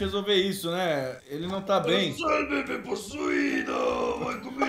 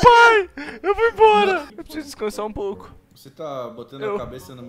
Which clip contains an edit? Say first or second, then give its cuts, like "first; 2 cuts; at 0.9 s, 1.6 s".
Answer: second; 1 cut; at 1.7 s